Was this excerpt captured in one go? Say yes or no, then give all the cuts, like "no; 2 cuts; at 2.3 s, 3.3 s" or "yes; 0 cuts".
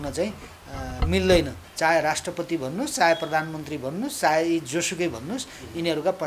no; 1 cut; at 1.6 s